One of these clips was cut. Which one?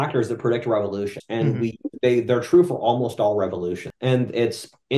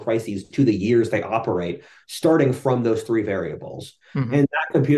first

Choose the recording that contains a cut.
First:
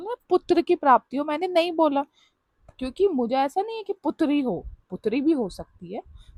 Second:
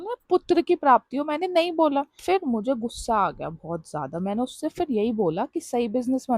second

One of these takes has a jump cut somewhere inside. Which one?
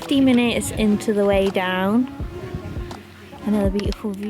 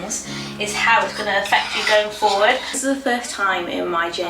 second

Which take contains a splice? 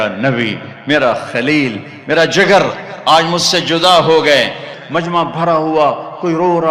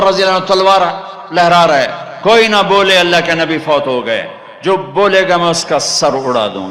first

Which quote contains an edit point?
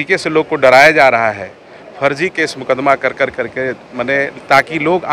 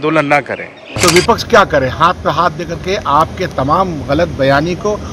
second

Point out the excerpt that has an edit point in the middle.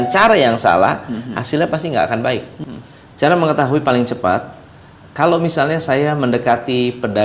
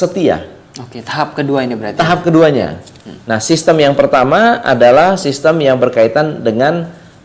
first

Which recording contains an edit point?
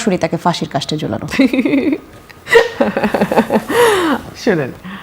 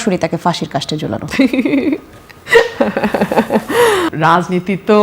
second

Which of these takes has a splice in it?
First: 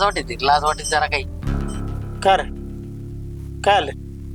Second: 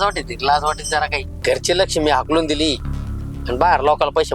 second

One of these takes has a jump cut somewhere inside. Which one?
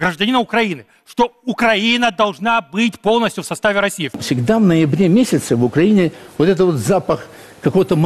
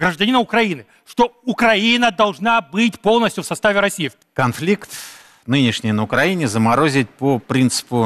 first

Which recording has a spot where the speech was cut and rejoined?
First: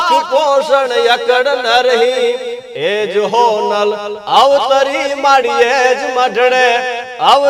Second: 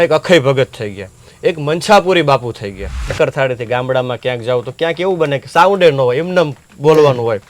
second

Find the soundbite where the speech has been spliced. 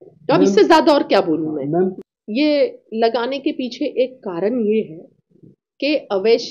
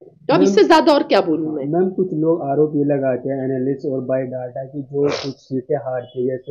first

